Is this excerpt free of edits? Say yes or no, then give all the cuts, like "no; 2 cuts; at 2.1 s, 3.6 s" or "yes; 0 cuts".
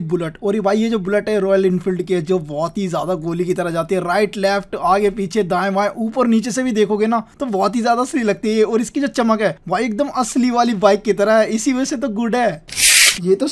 yes; 0 cuts